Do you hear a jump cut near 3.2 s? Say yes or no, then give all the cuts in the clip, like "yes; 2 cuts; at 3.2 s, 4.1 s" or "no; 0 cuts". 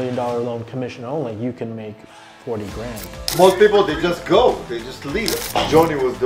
yes; 2 cuts; at 3.2 s, 5.4 s